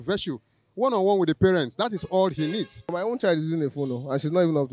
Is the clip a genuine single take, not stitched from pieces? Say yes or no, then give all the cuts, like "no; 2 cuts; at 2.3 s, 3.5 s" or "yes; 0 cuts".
no; 1 cut; at 2.9 s